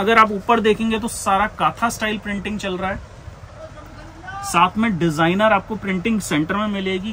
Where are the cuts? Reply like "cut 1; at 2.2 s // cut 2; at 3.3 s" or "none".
none